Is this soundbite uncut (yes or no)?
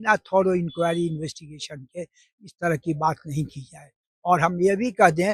yes